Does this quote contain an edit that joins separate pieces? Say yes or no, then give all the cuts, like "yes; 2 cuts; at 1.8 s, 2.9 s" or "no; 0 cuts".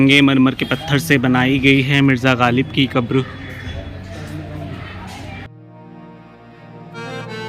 no; 0 cuts